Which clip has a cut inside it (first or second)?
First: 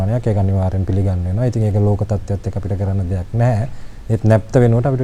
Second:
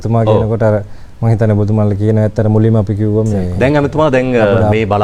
second